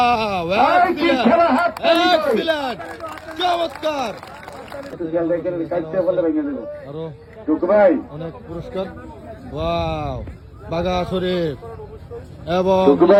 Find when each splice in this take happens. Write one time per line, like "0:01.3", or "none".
none